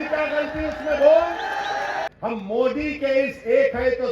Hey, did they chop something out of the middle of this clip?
yes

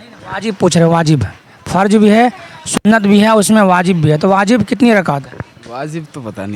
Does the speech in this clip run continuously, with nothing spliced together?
yes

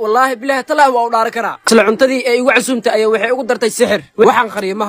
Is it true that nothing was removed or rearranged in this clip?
yes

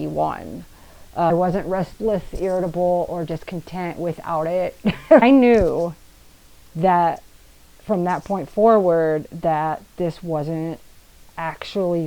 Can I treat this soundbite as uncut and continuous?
no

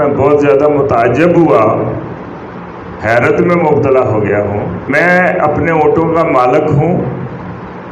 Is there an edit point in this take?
yes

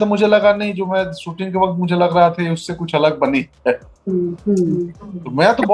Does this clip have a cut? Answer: no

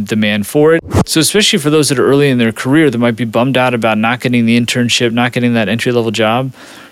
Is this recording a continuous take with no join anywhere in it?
no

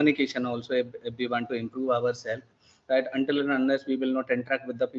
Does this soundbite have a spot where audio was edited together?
no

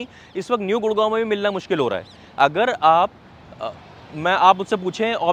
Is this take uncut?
yes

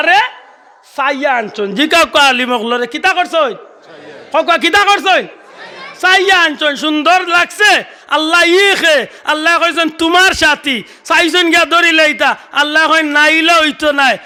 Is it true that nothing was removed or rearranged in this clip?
yes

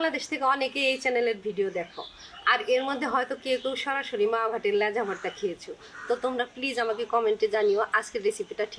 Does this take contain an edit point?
no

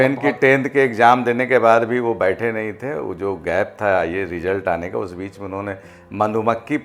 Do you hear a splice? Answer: no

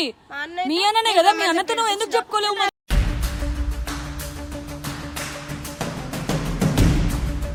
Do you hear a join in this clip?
no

